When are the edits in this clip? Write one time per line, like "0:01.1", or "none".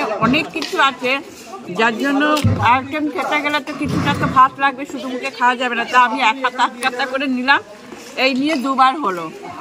none